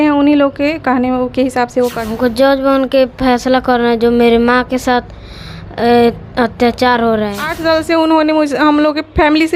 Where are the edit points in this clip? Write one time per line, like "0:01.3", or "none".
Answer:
0:02.0
0:07.5